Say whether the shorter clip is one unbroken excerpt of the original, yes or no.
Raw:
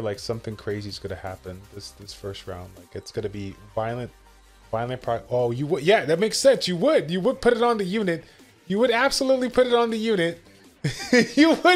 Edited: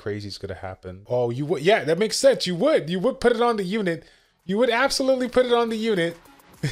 no